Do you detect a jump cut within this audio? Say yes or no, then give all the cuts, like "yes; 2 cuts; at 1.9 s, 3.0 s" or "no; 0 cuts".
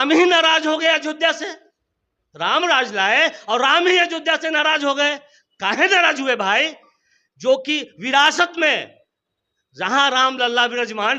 no; 0 cuts